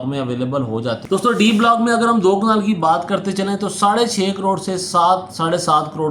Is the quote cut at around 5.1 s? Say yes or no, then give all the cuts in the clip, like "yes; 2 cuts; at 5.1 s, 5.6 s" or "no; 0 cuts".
no; 1 cut; at 1.0 s